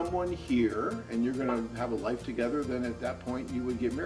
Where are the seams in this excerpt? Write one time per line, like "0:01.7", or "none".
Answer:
none